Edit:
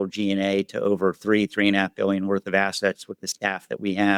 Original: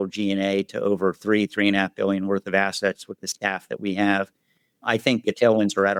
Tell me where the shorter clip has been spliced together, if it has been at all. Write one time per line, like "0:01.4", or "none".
none